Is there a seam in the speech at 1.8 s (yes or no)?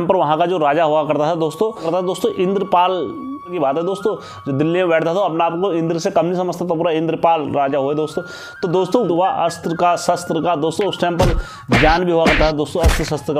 yes